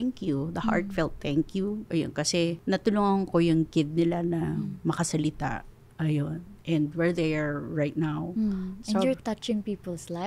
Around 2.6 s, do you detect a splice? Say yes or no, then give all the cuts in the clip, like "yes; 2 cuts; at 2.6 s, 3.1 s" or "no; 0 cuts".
yes; 1 cut; at 2.6 s